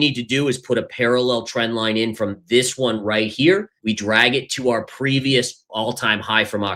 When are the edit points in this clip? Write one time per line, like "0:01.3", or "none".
0:03.7